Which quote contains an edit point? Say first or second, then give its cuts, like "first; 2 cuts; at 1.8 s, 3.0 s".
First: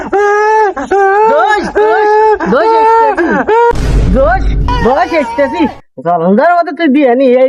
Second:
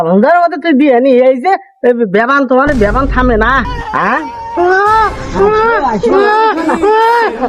first; 1 cut; at 1.6 s